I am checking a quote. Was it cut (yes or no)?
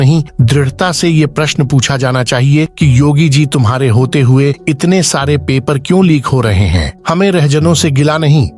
no